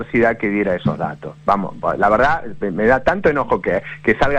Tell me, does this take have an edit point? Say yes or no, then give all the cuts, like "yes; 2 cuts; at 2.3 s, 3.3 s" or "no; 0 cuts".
no; 0 cuts